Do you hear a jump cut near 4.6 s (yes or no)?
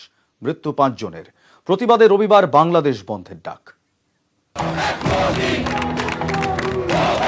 yes